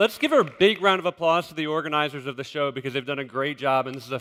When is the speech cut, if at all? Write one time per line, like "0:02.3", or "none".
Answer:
none

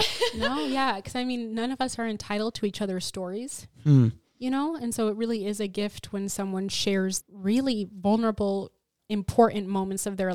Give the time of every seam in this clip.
0:07.3
0:09.0

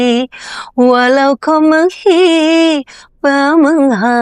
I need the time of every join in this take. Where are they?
none

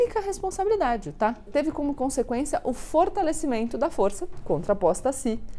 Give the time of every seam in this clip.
0:01.4

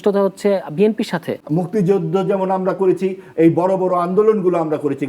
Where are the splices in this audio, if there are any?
0:01.4

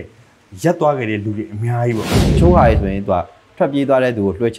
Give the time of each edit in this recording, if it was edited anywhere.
0:02.2

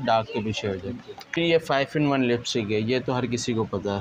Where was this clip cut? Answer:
0:01.4

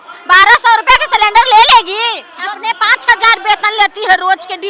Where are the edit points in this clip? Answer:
0:02.3

